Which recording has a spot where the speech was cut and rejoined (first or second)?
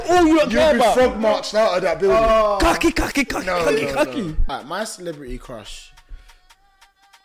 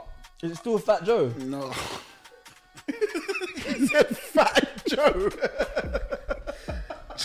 first